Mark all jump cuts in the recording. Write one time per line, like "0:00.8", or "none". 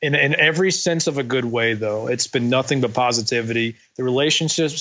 none